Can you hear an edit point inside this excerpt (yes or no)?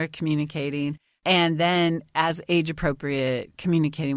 yes